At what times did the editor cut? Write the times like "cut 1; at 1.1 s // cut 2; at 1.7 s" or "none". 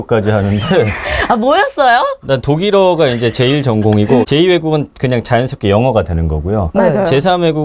cut 1; at 4.2 s